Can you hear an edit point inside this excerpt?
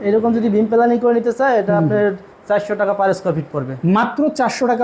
no; 0 cuts

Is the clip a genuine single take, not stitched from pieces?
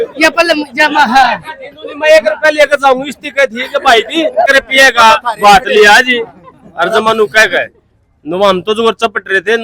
no; 1 cut; at 4.5 s

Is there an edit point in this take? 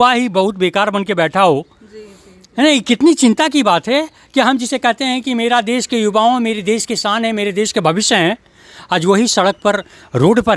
no; 0 cuts

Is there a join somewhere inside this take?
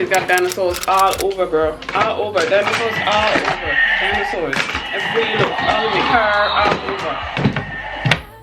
no; 0 cuts

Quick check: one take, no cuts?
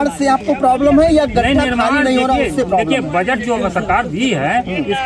yes; 0 cuts

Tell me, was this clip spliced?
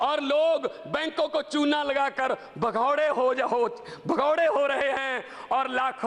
no; 0 cuts

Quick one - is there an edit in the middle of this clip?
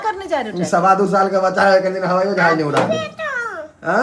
no; 0 cuts

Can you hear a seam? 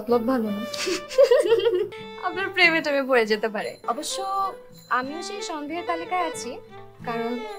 yes; 2 cuts; at 2.0 s, 3.8 s

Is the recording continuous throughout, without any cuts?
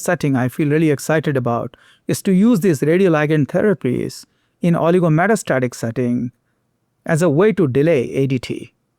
yes; 0 cuts

